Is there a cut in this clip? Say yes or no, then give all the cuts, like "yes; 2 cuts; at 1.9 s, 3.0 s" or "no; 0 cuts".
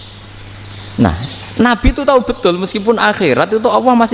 no; 0 cuts